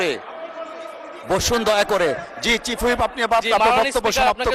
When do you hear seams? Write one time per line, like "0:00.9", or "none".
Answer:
none